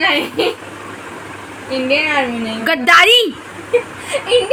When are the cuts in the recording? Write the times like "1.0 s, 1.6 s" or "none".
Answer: none